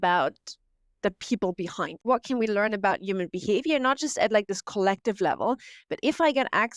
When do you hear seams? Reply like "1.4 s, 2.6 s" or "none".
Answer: 2.0 s